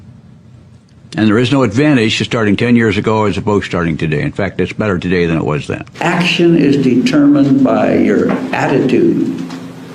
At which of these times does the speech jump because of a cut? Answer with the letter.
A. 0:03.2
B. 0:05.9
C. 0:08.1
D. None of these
B